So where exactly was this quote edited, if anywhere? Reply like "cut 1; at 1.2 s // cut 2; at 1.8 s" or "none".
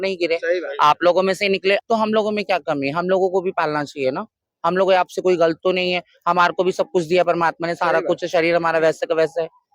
cut 1; at 1.8 s